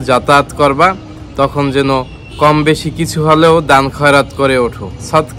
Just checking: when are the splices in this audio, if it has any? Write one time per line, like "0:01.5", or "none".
none